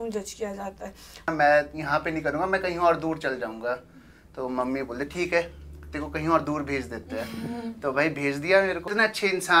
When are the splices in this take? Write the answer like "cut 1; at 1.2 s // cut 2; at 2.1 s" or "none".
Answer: cut 1; at 1.2 s // cut 2; at 8.9 s